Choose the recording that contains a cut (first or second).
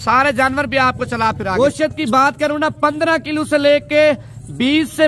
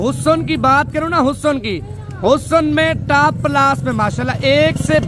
first